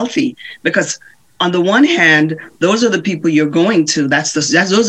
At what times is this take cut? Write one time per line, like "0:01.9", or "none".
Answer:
none

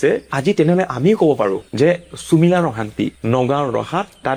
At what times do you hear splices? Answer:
none

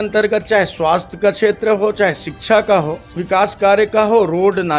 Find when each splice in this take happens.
0:03.2

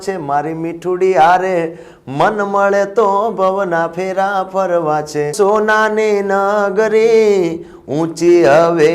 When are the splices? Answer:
0:05.3

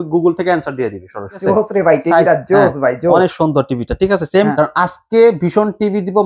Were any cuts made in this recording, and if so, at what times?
0:01.4
0:04.5

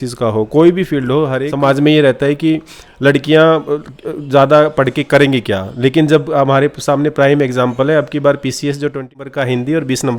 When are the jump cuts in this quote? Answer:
0:01.4
0:09.2

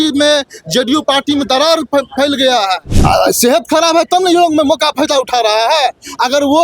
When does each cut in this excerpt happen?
0:02.9

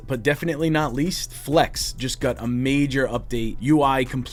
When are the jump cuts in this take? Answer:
none

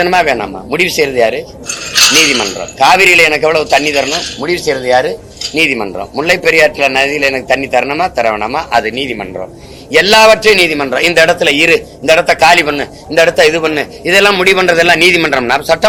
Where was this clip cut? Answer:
none

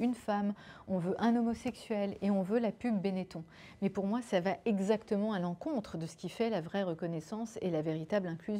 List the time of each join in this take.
none

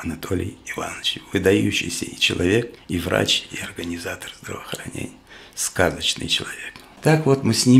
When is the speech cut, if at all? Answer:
0:02.8
0:06.8

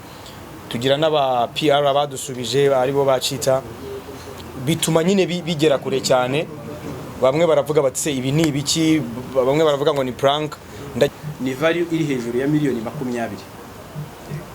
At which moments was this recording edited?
0:11.1

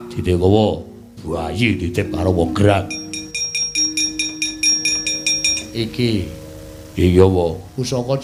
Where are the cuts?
none

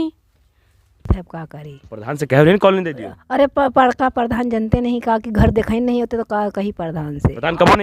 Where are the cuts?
0:01.1

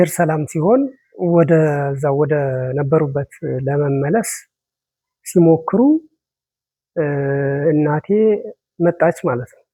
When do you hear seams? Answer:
none

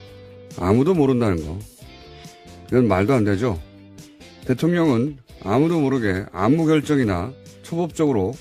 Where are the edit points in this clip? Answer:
0:05.3

